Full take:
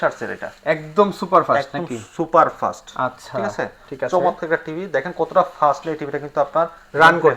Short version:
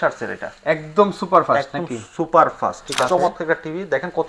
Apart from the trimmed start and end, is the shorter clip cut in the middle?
yes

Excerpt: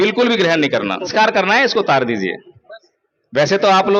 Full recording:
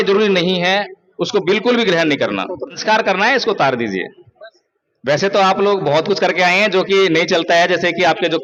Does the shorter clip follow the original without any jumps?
no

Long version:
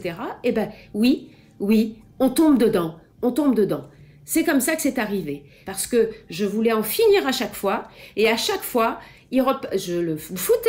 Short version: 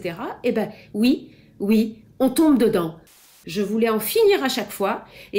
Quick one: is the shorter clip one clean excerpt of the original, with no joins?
no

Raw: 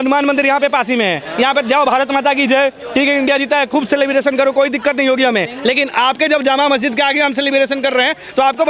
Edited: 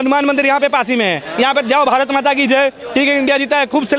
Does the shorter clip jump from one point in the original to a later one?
no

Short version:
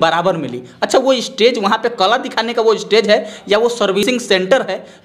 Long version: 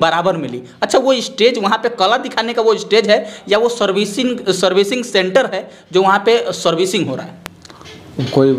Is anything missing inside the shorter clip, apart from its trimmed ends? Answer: yes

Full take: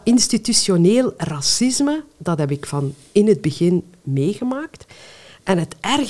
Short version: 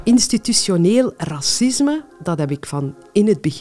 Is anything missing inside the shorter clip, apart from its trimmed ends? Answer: no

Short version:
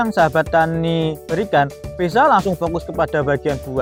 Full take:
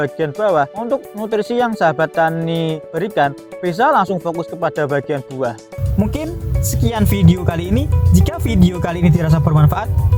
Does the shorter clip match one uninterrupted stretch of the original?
yes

